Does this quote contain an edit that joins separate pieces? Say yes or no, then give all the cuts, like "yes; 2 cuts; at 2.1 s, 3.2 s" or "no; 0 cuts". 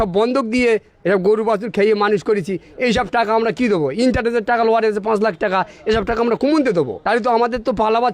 yes; 1 cut; at 7.0 s